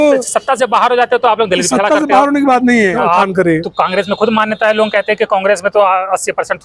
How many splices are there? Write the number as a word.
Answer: one